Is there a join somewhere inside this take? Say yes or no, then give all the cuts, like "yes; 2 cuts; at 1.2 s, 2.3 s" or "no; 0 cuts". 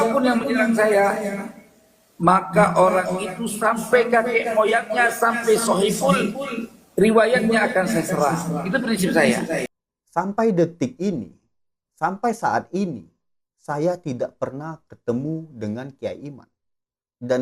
yes; 1 cut; at 9.7 s